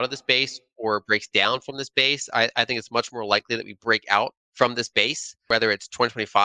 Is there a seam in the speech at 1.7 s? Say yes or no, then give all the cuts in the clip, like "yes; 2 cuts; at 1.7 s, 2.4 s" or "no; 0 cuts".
no; 2 cuts; at 4.4 s, 5.3 s